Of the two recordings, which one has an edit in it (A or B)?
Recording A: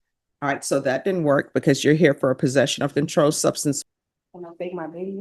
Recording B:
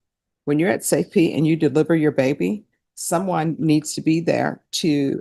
A